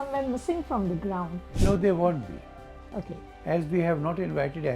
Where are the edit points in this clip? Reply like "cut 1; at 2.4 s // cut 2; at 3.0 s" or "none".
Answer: none